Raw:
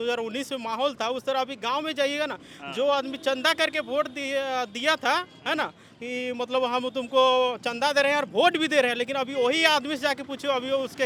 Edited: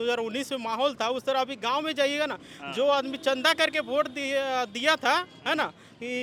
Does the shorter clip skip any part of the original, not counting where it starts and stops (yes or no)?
no